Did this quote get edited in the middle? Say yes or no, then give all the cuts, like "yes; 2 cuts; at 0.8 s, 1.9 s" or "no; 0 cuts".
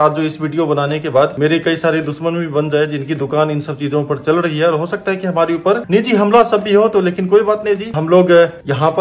no; 0 cuts